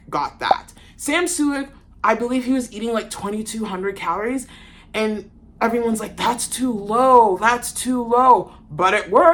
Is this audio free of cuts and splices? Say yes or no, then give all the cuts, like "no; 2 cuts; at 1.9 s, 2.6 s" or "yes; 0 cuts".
yes; 0 cuts